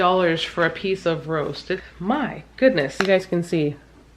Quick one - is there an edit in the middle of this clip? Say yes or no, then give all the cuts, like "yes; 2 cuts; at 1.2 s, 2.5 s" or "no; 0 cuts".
yes; 2 cuts; at 1.8 s, 2.9 s